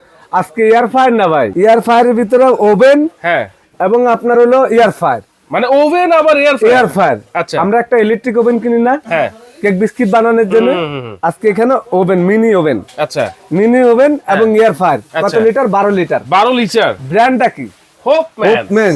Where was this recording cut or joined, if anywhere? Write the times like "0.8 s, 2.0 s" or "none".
1.5 s